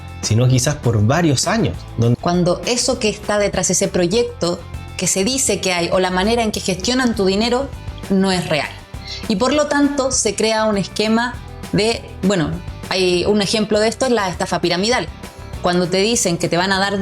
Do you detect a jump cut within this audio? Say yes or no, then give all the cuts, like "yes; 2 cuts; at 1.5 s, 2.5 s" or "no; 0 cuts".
yes; 1 cut; at 2.1 s